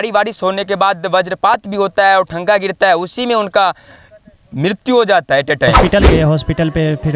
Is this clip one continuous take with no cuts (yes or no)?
no